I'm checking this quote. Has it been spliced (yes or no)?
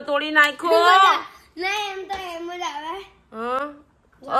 no